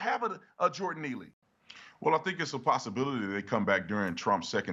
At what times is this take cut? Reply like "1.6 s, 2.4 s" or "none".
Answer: 1.4 s